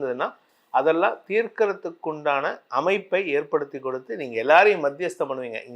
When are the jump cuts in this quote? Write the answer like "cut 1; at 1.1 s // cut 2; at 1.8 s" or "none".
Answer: none